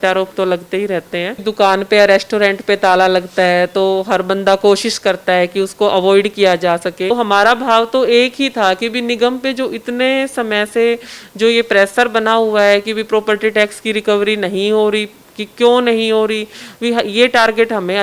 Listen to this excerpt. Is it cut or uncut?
cut